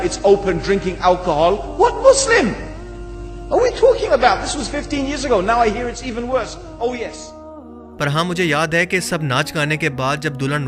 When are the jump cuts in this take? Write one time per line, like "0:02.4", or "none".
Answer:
none